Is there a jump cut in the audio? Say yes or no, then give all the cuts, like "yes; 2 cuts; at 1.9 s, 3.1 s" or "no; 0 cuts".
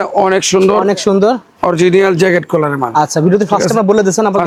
no; 0 cuts